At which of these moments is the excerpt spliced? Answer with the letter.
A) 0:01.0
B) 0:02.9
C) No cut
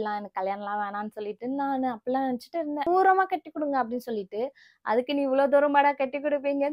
B